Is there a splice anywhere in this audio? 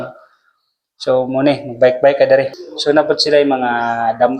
yes; 1 cut; at 2.6 s

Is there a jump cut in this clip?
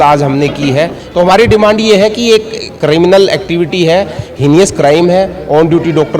yes; 1 cut; at 1.0 s

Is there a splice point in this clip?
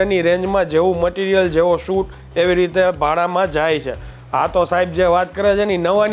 no; 0 cuts

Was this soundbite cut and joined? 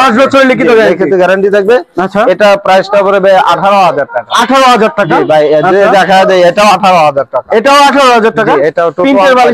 no; 0 cuts

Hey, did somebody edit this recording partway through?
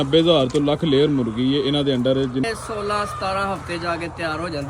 yes; 1 cut; at 2.4 s

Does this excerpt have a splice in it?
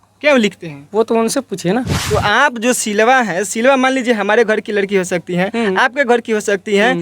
yes; 1 cut; at 2.0 s

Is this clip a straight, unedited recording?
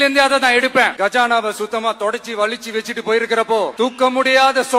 no; 2 cuts; at 0.9 s, 3.7 s

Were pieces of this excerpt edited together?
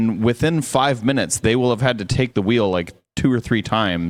no; 0 cuts

